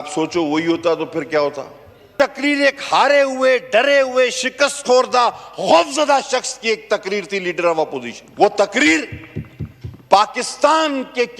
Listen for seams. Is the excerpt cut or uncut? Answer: cut